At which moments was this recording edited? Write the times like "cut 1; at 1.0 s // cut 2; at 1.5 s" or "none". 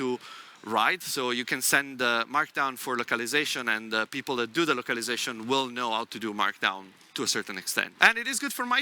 cut 1; at 7.9 s